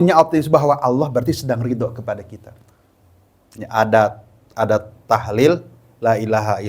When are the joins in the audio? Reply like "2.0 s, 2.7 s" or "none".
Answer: 3.6 s